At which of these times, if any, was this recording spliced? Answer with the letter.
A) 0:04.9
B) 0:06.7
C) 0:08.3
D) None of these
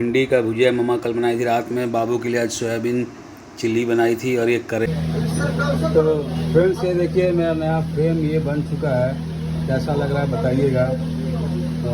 A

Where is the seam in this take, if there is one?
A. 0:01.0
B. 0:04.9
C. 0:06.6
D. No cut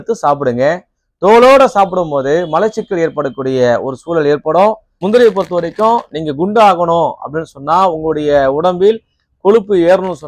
B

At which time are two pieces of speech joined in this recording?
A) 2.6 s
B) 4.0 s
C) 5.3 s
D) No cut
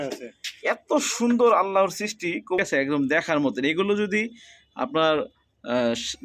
A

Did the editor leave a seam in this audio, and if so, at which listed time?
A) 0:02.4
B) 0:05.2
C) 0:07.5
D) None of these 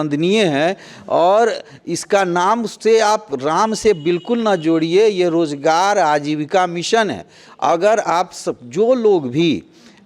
D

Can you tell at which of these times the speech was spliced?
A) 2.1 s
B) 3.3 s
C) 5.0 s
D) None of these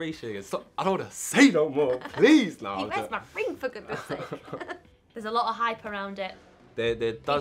C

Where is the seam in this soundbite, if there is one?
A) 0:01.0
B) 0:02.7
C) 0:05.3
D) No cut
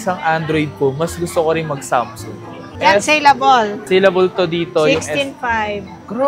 D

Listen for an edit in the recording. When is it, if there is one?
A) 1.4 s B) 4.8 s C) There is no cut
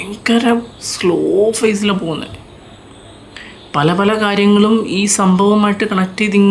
C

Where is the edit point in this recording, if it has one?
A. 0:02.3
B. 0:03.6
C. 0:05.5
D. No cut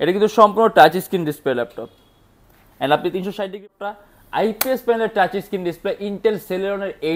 B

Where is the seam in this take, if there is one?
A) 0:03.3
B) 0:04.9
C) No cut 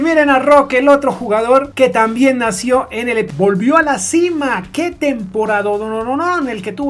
A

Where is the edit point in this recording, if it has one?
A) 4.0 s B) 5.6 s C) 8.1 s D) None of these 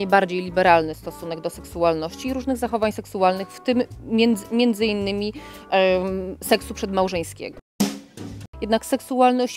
C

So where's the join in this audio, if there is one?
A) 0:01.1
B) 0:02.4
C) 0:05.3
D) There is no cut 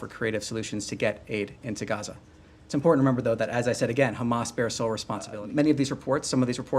C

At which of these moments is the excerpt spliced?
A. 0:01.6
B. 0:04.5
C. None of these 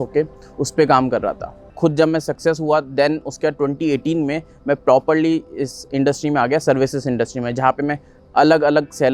A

